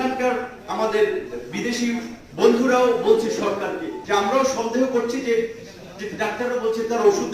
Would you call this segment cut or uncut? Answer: cut